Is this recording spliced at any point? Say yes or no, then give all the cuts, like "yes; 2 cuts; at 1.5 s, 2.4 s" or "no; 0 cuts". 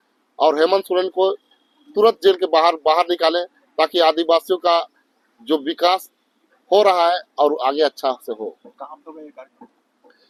no; 0 cuts